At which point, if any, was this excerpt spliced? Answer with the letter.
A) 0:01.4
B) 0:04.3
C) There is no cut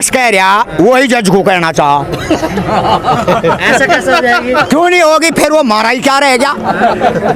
C